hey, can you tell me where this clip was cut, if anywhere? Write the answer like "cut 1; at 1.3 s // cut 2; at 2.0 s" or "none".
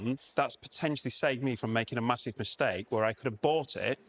none